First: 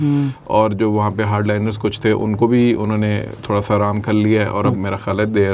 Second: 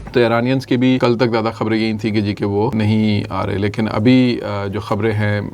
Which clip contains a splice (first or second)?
second